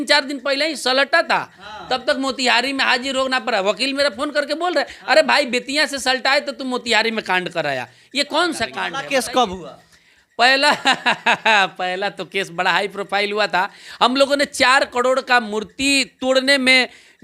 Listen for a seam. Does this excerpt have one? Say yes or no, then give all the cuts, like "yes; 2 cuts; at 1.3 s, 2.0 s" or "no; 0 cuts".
yes; 1 cut; at 8.9 s